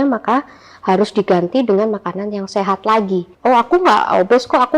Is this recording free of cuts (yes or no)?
no